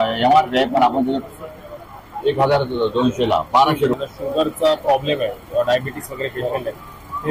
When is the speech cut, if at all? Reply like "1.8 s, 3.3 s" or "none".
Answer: 4.0 s

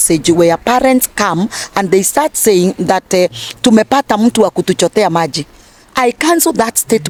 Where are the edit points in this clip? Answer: none

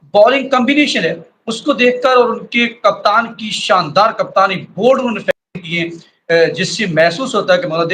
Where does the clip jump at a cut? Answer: none

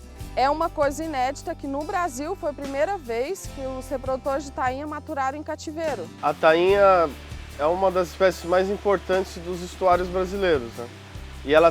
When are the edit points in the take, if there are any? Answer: 6.1 s

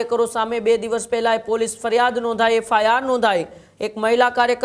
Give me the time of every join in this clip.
none

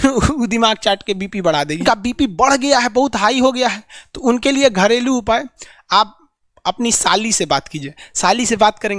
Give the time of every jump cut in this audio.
1.8 s

